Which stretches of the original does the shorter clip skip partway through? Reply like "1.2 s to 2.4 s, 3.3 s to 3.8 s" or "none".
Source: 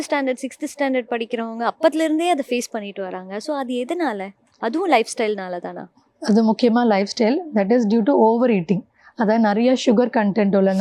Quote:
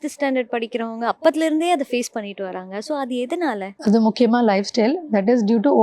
4.3 s to 6.1 s